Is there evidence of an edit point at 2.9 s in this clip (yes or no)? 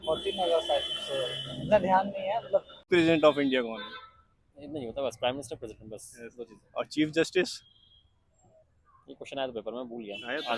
yes